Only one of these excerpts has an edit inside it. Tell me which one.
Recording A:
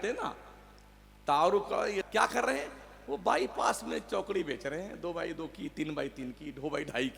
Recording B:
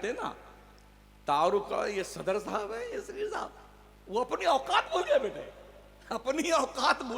A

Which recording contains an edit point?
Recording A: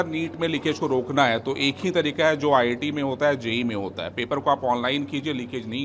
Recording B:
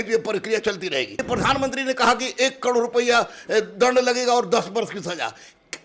B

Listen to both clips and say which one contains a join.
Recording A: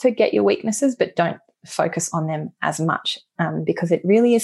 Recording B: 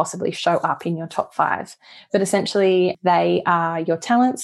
B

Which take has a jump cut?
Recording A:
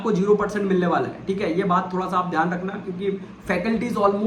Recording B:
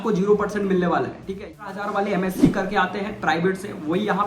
B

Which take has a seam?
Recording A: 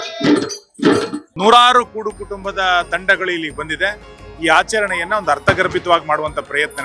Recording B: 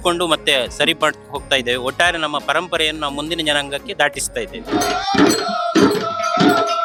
A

